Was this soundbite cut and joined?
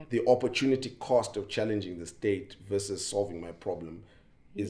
no; 0 cuts

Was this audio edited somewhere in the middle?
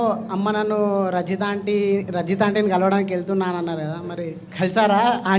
no; 0 cuts

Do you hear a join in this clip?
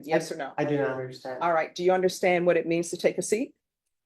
no; 0 cuts

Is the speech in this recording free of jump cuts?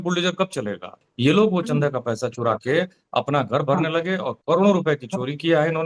no; 1 cut; at 1.0 s

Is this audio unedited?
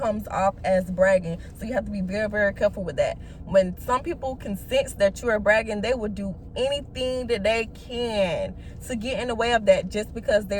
yes; 0 cuts

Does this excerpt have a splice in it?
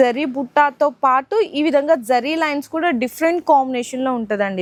no; 0 cuts

